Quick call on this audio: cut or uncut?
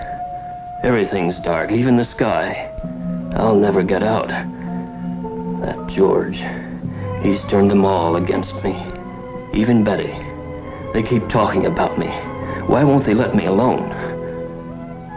uncut